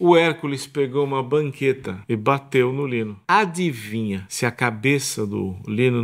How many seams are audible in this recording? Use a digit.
3